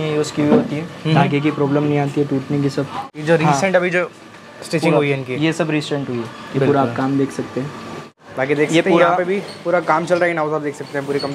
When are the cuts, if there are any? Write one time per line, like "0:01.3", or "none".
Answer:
0:03.1
0:08.2